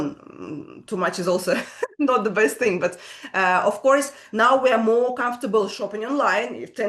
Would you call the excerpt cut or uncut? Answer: uncut